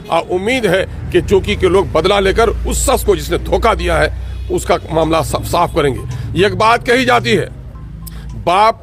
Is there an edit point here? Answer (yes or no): no